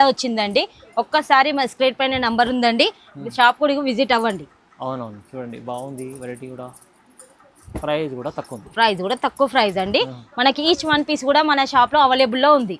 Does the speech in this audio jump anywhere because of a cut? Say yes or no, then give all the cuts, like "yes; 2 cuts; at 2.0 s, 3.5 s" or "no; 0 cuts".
no; 0 cuts